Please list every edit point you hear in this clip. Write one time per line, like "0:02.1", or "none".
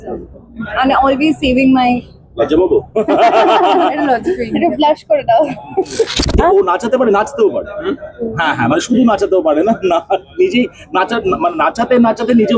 0:06.2